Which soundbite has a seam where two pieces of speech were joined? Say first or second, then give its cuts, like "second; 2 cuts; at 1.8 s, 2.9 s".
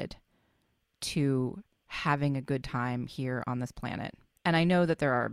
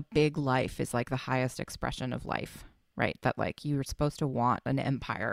first; 1 cut; at 4.2 s